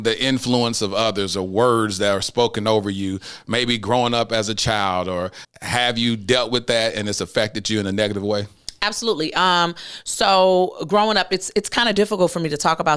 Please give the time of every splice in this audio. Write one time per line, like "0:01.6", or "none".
0:05.4